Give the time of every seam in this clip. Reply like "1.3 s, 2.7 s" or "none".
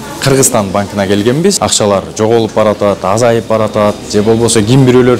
1.6 s